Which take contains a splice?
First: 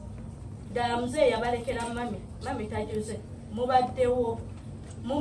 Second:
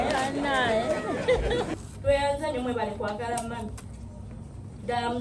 second; 1 cut; at 1.7 s

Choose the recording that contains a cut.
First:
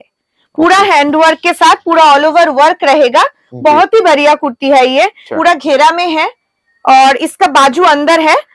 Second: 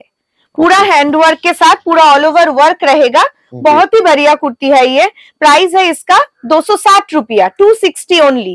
first; 1 cut; at 5.2 s

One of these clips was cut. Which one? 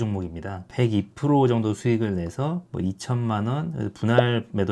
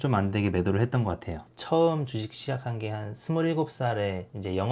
second; 1 cut; at 1.5 s

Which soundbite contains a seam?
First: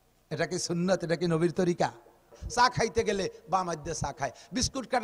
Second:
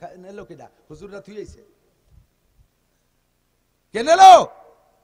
first; 1 cut; at 2.4 s

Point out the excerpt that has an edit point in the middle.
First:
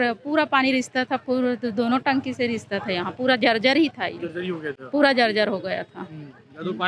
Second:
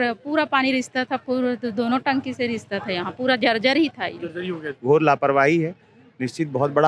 second; 1 cut; at 4.8 s

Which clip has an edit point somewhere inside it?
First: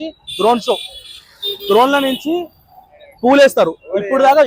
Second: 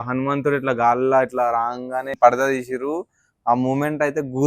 second; 1 cut; at 2.1 s

